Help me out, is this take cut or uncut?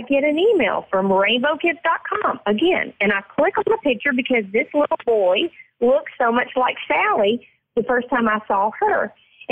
uncut